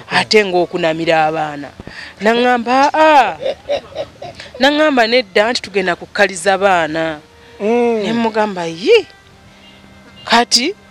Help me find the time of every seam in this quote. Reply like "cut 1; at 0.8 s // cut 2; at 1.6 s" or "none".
none